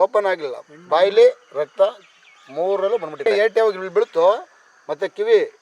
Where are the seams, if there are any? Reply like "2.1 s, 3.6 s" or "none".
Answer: 3.2 s